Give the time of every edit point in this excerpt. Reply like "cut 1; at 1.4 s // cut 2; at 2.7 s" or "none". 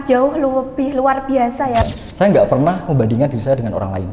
cut 1; at 1.9 s